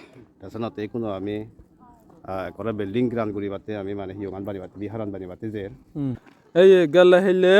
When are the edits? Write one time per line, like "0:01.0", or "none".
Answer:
0:06.3